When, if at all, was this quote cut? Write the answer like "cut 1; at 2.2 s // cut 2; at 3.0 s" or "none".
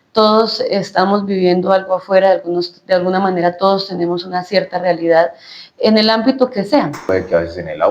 cut 1; at 7.0 s